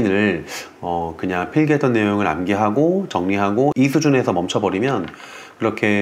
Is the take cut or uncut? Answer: uncut